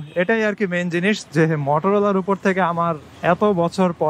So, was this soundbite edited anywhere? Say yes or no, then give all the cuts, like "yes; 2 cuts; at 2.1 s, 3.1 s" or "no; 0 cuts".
no; 0 cuts